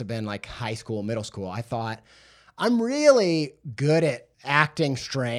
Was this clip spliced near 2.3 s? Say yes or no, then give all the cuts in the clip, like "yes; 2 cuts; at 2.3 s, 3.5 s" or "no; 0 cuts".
no; 1 cut; at 4.3 s